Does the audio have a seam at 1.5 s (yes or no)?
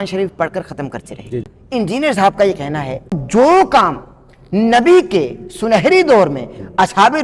yes